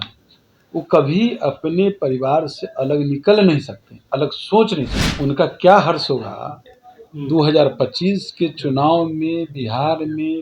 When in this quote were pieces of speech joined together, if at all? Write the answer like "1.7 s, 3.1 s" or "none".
5.0 s